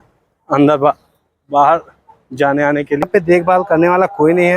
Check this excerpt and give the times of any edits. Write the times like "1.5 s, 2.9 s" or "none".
3.0 s